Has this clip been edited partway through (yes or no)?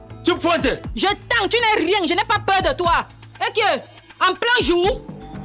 no